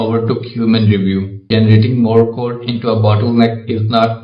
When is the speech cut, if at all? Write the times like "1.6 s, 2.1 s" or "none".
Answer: 1.4 s